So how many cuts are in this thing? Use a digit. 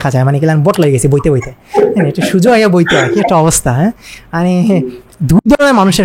0